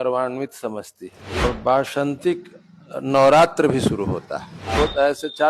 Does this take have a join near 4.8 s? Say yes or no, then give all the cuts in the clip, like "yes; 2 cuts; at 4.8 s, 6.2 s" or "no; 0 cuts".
yes; 2 cuts; at 1.4 s, 4.8 s